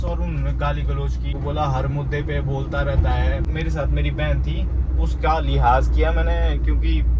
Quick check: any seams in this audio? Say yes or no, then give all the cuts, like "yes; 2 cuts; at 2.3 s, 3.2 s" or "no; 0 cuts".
yes; 2 cuts; at 1.3 s, 3.5 s